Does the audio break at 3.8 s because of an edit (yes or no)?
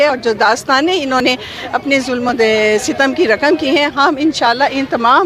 no